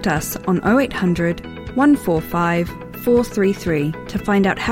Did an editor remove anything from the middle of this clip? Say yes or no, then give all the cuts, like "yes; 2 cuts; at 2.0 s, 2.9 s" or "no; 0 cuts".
no; 0 cuts